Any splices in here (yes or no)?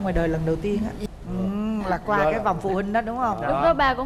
yes